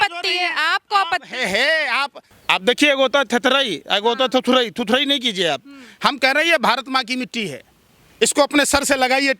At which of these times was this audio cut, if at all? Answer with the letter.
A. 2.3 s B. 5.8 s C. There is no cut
A